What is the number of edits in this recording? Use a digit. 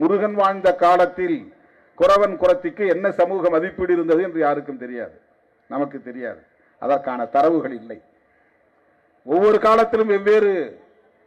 0